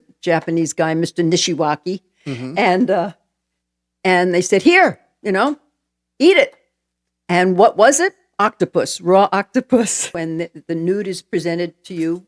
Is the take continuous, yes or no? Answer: no